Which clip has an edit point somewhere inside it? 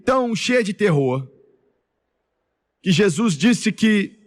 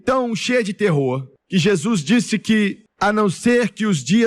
second; 2 cuts; at 1.3 s, 2.8 s

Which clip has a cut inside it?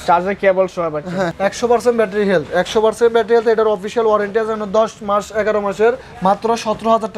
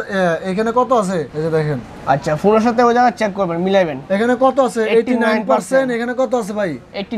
first; 2 cuts; at 1.4 s, 6.1 s

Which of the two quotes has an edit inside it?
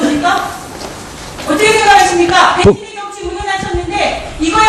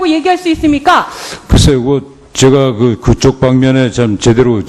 second; 1 cut; at 2.4 s

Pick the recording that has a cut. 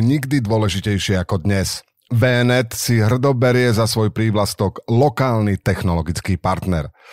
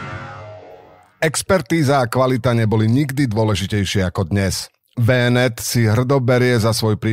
second; 1 cut; at 1.0 s

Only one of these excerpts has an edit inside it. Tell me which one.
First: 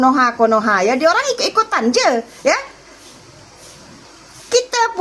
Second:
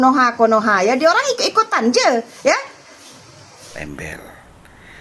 second; 1 cut; at 3.8 s

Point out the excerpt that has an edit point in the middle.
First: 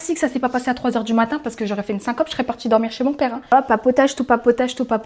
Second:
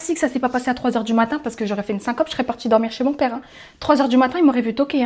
first; 1 cut; at 3.5 s

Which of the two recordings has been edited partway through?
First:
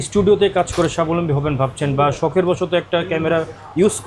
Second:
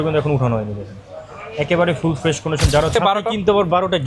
second; 1 cut; at 2.9 s

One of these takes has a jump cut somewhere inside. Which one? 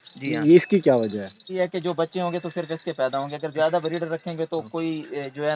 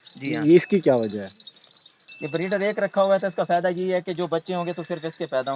first; 1 cut; at 1.5 s

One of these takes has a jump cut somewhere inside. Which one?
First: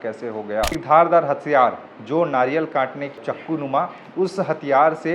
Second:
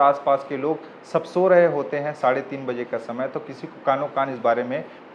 first; 2 cuts; at 0.8 s, 3.2 s

